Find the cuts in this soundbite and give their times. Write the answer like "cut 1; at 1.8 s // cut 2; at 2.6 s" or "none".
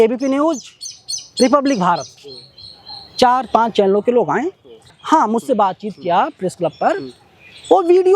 cut 1; at 4.9 s